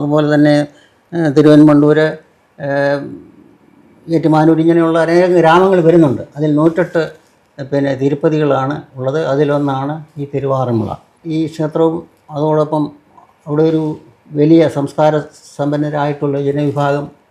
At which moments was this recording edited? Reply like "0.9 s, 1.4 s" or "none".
none